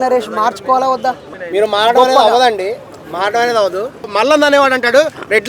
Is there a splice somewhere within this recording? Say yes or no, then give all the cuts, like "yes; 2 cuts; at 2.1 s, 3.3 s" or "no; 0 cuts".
yes; 2 cuts; at 1.3 s, 4.0 s